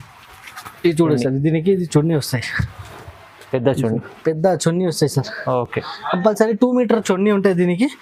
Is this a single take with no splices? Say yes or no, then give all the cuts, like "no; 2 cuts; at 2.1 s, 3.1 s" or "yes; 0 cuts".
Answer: yes; 0 cuts